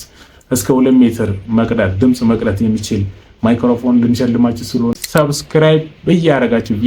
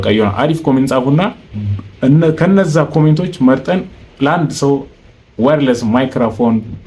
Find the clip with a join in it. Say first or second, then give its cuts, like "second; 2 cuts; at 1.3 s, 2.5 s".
first; 1 cut; at 5.0 s